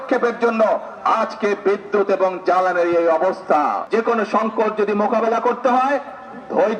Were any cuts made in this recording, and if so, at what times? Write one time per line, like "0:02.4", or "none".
none